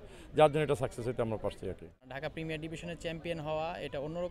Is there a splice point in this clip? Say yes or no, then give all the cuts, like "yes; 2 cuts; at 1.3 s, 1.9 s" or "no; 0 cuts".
yes; 1 cut; at 2.0 s